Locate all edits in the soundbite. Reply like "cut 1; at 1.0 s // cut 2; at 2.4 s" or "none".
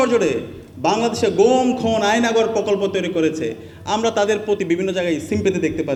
none